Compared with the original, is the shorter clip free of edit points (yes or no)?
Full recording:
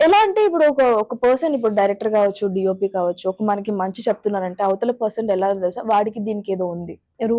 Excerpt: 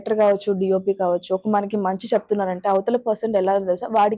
yes